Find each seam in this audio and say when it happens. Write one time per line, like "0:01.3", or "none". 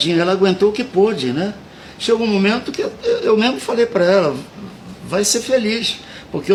none